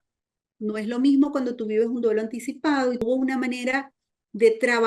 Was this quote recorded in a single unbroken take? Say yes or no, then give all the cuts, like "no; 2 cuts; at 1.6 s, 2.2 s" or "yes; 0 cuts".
no; 1 cut; at 3.0 s